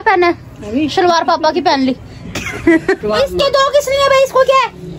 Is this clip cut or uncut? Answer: cut